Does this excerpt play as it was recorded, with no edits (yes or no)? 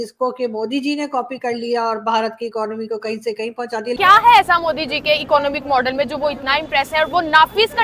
no